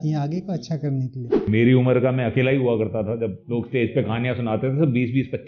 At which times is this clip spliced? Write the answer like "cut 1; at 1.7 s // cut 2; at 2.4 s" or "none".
cut 1; at 1.4 s // cut 2; at 3.4 s